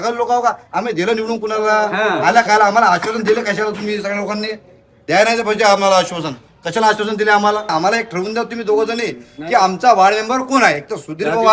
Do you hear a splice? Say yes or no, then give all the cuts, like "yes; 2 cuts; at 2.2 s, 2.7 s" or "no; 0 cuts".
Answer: yes; 1 cut; at 7.7 s